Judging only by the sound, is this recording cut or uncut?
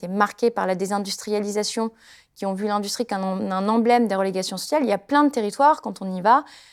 uncut